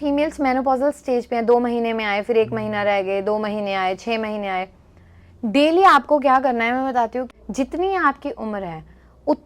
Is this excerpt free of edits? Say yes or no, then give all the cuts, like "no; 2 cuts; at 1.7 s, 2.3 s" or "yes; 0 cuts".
no; 1 cut; at 7.2 s